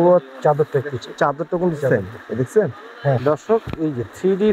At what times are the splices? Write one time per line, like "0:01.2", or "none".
0:03.2